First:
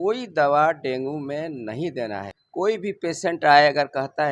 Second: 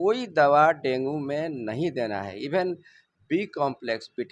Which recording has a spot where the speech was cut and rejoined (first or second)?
first